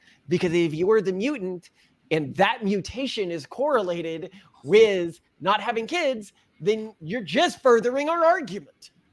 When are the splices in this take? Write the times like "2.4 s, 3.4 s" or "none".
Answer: none